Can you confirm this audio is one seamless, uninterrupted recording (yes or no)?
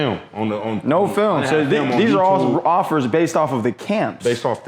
yes